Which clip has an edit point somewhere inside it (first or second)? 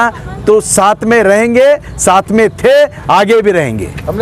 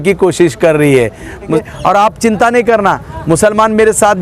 second